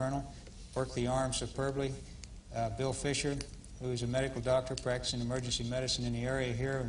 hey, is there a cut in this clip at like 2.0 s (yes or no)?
yes